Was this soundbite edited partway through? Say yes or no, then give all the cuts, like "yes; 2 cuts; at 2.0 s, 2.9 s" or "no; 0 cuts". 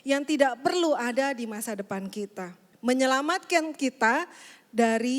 yes; 1 cut; at 2.6 s